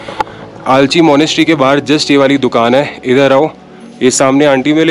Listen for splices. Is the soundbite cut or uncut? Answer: uncut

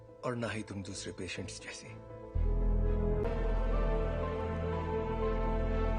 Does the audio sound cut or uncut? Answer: cut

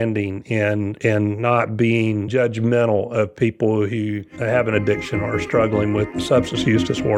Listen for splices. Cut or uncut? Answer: cut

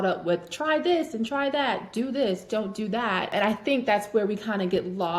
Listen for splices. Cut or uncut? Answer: cut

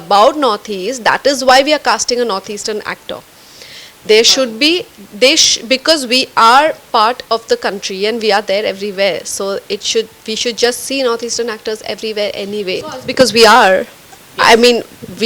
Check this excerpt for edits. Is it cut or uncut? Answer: uncut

